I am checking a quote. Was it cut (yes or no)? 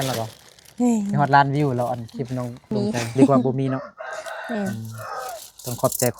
yes